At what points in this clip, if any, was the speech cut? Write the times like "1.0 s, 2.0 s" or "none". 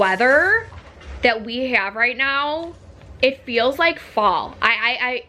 none